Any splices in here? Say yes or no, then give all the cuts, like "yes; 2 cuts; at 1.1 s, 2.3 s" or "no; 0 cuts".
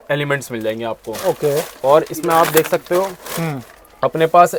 no; 0 cuts